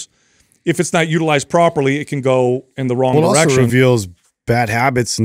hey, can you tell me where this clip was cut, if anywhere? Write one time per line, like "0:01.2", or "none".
0:03.1

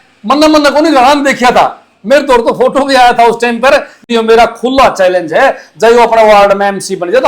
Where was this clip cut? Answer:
0:04.0

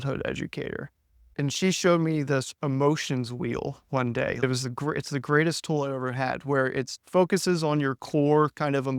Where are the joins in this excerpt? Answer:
0:01.3
0:04.4
0:07.0

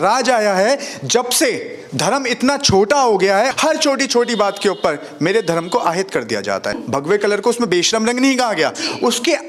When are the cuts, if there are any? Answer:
0:03.5
0:06.8

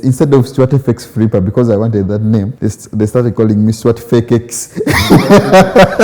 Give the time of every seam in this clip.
0:02.5

